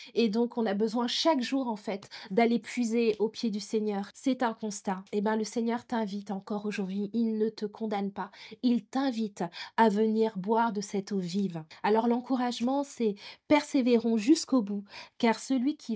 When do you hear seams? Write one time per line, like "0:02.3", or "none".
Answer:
0:04.1
0:11.6